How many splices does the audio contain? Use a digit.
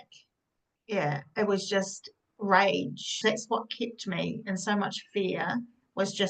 1